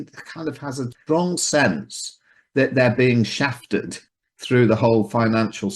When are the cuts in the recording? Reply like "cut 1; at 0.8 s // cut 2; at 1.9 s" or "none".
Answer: cut 1; at 0.9 s // cut 2; at 4.0 s